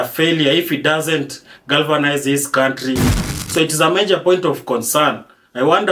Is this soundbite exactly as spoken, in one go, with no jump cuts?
no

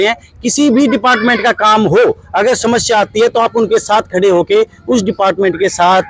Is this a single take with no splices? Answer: yes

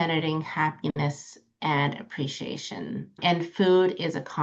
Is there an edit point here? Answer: yes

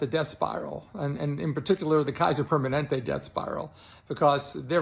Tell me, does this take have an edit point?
no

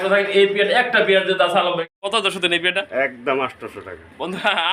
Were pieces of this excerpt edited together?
yes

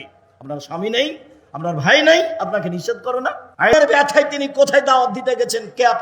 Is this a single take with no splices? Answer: no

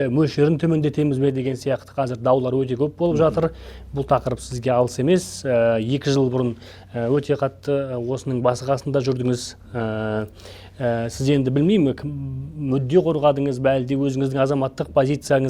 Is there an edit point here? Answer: no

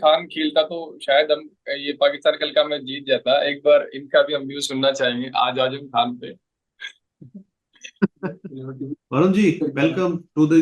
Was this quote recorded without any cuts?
yes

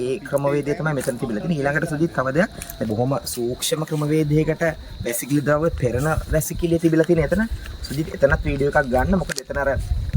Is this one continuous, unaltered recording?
no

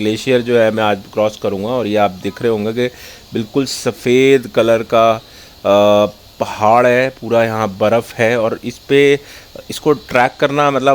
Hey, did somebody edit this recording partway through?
no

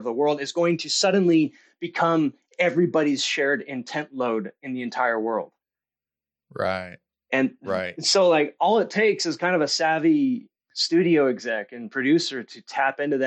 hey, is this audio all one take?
yes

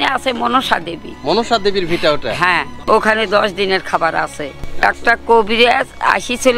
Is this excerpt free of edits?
no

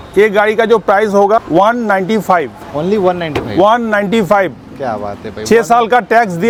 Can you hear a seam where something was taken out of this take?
no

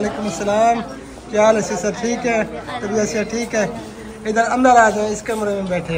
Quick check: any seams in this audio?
no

